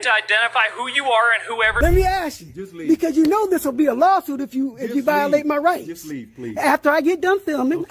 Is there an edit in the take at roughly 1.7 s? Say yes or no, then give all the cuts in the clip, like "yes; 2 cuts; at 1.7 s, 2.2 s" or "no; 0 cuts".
yes; 1 cut; at 1.7 s